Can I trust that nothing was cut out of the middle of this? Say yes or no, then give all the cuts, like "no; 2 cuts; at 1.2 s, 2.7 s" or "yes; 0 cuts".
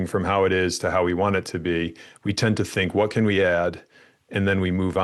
yes; 0 cuts